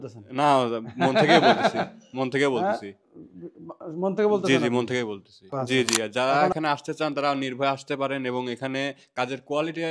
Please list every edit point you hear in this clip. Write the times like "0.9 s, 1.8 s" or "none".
5.6 s